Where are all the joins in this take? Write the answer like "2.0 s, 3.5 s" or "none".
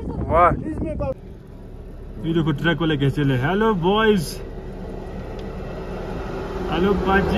1.1 s